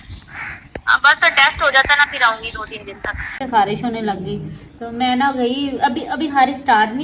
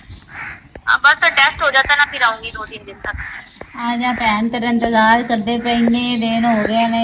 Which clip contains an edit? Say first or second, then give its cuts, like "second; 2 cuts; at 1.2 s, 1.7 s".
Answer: first; 1 cut; at 3.4 s